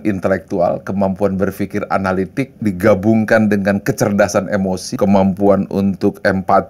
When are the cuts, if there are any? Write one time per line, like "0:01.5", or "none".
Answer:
0:02.6
0:04.9